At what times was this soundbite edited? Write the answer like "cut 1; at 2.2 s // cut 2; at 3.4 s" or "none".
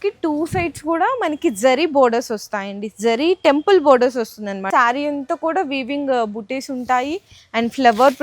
cut 1; at 4.7 s